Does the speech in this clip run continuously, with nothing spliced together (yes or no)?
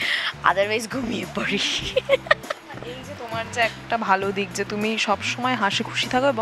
yes